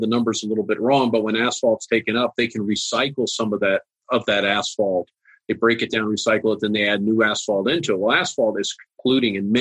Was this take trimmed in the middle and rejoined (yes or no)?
no